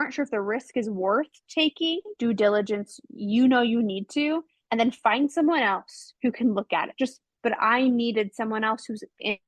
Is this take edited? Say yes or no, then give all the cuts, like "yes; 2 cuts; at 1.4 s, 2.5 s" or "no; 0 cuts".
yes; 2 cuts; at 2.1 s, 7.3 s